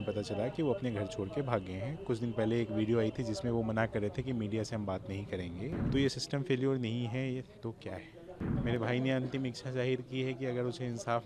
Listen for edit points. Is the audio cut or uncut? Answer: cut